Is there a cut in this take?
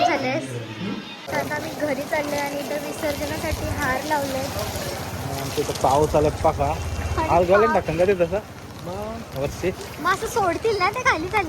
yes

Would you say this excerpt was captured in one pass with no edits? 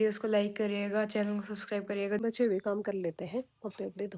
no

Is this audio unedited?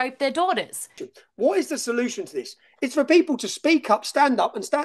no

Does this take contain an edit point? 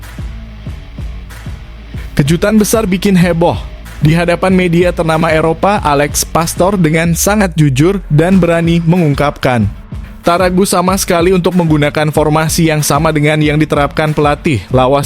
yes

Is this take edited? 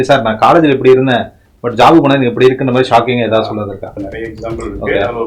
yes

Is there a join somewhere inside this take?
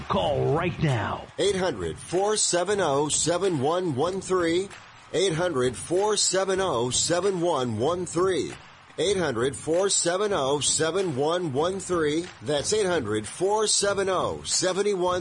yes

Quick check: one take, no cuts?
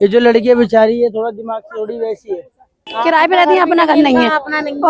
no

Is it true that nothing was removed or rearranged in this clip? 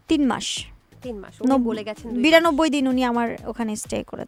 yes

